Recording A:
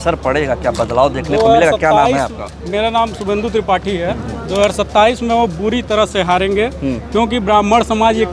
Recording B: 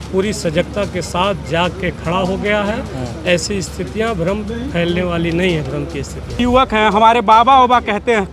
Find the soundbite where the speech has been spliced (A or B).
B